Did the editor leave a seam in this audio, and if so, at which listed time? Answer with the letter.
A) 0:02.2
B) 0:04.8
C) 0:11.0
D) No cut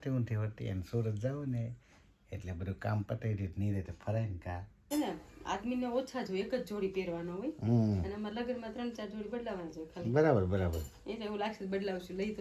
B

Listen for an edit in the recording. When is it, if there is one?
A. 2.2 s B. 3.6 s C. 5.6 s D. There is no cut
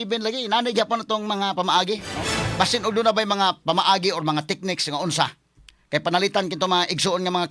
A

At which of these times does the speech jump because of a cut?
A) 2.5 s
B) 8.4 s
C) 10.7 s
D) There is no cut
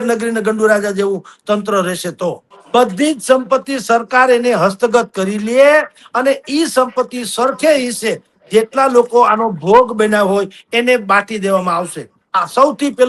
A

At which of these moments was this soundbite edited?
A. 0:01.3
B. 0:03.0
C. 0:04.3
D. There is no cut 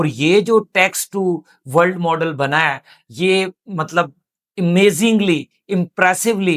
D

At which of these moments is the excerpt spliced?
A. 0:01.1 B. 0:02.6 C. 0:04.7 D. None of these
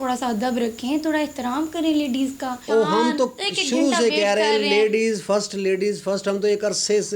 B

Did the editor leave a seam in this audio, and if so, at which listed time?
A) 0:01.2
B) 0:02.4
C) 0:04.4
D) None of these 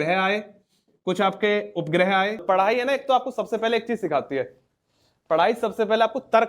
B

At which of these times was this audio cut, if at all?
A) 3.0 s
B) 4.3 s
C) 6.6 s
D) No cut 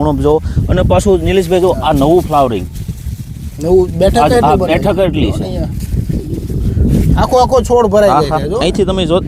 D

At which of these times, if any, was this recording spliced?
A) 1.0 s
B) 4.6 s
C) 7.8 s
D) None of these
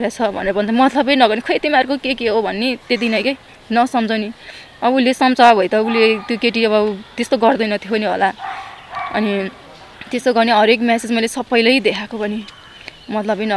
D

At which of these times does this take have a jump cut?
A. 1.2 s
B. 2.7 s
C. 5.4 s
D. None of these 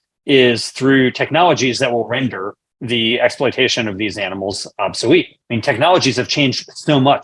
C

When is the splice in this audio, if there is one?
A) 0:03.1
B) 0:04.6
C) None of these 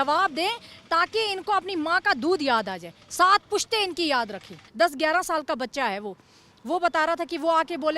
B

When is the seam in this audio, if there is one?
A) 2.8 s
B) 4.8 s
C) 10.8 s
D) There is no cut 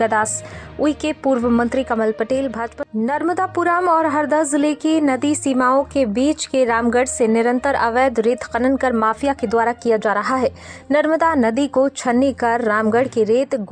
A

